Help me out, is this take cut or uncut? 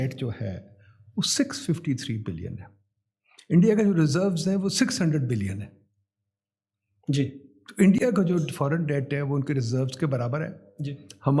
uncut